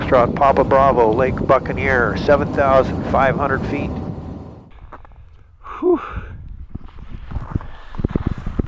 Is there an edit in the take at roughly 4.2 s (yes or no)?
yes